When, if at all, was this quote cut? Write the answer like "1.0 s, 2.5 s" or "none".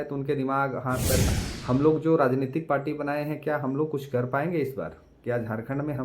1.3 s